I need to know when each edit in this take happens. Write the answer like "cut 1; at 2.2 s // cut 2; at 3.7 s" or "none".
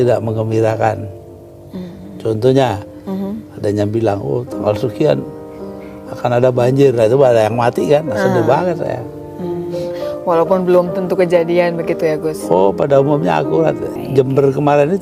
cut 1; at 14.0 s